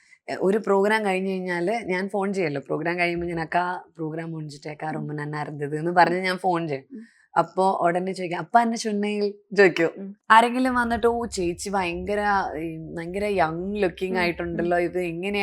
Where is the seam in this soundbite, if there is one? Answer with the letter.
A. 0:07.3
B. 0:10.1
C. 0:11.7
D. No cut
B